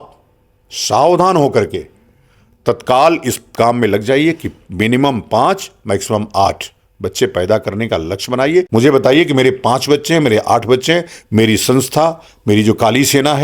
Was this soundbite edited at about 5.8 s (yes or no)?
no